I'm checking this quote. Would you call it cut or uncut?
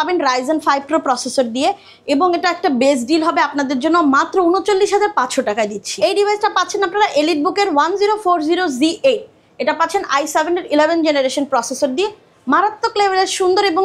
cut